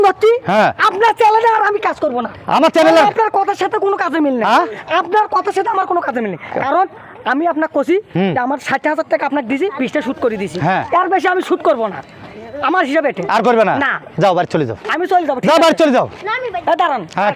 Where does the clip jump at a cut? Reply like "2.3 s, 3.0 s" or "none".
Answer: none